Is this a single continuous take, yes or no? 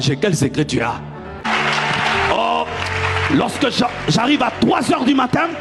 no